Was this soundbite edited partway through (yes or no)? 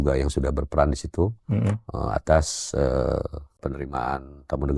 yes